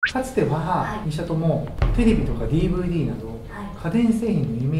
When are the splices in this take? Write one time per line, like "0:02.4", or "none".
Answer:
0:01.0